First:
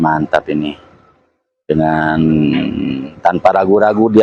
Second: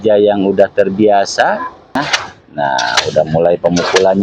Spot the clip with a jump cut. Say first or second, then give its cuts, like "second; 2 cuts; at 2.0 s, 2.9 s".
second; 1 cut; at 2.0 s